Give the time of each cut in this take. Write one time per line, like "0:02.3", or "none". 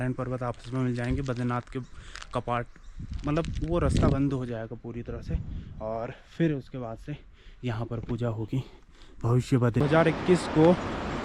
0:09.8